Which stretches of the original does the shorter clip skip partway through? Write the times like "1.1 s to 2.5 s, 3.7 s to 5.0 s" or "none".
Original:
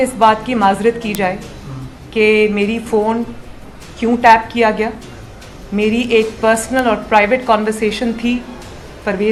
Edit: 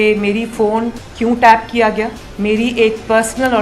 3.4 s to 3.8 s, 5.0 s to 5.6 s